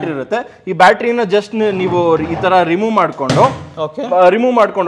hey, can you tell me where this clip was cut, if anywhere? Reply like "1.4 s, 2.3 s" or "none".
none